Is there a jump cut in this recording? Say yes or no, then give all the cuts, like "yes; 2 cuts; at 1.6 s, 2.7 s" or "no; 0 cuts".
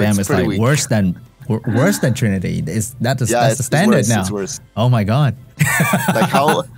yes; 1 cut; at 5.5 s